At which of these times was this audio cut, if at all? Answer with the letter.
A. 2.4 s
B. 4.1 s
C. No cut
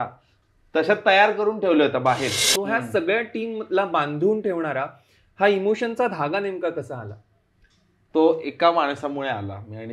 A